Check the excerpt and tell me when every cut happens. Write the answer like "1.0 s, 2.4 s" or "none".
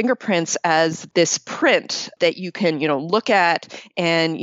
1.0 s, 2.1 s